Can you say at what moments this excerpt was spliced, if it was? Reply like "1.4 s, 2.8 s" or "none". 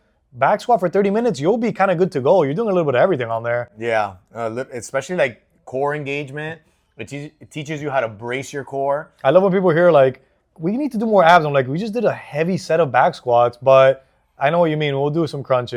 none